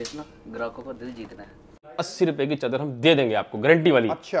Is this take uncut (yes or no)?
no